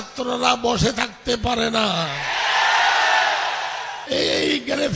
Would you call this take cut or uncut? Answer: cut